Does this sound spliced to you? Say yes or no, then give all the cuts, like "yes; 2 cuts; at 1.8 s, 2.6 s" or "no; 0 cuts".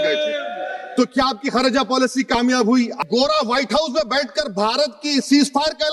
yes; 1 cut; at 3.0 s